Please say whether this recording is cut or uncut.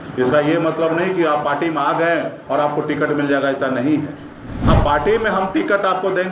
uncut